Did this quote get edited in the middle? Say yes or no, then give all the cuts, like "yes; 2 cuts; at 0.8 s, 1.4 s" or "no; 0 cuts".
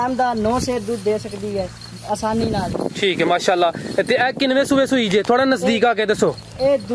no; 0 cuts